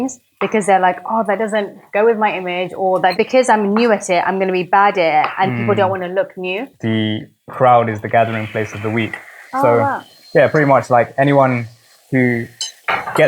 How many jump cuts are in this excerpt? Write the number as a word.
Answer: one